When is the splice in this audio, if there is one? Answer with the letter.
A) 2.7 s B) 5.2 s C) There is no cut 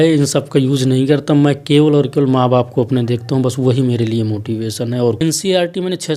B